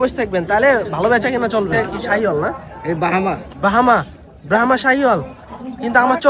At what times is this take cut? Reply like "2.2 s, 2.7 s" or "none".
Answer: 1.9 s